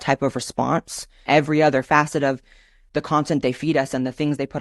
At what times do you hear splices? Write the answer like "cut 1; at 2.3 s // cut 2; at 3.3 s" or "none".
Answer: cut 1; at 1.3 s